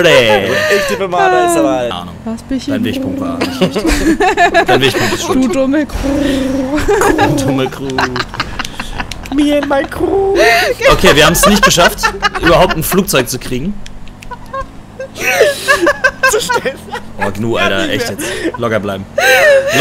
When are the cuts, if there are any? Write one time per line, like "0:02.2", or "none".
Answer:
none